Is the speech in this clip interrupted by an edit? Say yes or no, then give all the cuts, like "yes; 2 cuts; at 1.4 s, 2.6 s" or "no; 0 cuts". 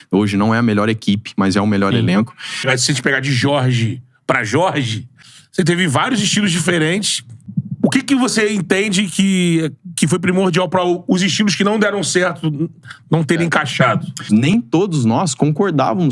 yes; 2 cuts; at 2.7 s, 14.3 s